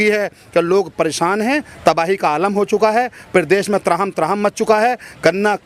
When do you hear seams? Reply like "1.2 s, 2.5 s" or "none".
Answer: none